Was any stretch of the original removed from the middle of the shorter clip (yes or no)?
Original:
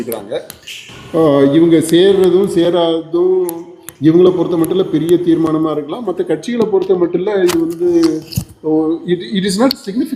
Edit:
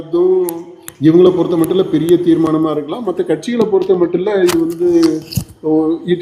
no